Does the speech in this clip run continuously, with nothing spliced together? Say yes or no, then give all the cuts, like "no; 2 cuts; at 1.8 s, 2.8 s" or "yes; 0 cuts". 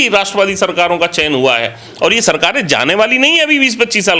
yes; 0 cuts